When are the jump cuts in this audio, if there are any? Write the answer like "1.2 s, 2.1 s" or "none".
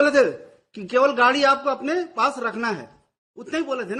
none